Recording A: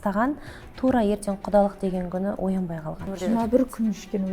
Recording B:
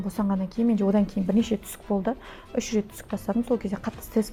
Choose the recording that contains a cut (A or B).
A